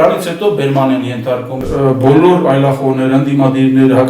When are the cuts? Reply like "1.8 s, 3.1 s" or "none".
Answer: 1.6 s